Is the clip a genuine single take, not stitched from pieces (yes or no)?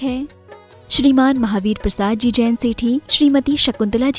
yes